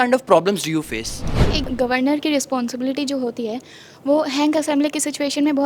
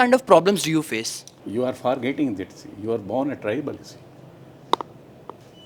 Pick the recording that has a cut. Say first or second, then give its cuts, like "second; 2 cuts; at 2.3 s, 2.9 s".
first; 1 cut; at 1.5 s